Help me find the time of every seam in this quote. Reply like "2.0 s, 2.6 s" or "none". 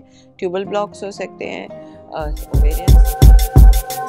2.4 s